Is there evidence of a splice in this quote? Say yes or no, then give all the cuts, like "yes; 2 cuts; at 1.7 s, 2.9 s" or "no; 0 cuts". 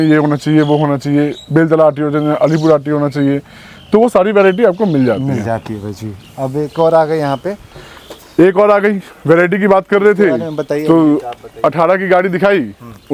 no; 0 cuts